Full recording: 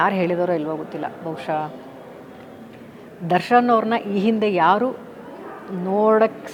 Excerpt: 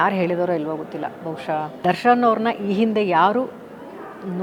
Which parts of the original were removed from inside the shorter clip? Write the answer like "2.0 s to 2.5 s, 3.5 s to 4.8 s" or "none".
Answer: 1.8 s to 3.2 s